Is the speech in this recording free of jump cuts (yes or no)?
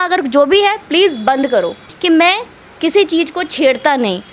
no